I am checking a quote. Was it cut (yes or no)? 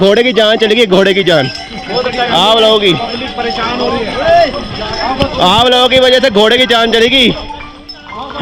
no